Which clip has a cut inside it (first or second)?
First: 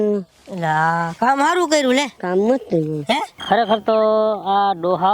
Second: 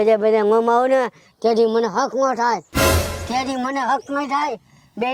first